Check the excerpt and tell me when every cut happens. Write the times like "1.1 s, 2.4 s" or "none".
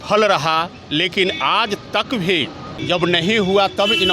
2.7 s